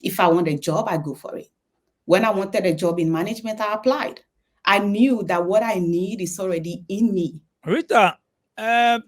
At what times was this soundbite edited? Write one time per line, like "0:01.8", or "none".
0:07.5